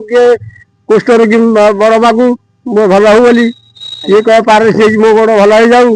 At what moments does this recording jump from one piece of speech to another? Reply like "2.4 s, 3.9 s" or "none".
none